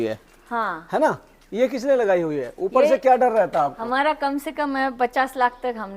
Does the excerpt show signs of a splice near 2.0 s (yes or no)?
no